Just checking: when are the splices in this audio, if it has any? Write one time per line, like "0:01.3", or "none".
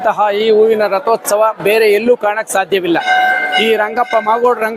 none